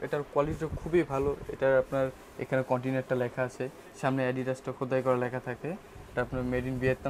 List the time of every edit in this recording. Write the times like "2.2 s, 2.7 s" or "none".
none